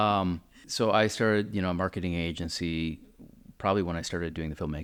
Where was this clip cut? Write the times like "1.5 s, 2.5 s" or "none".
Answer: none